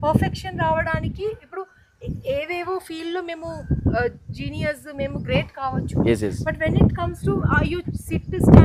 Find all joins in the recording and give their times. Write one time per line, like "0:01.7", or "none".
none